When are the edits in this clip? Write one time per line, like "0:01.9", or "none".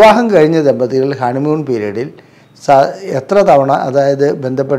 none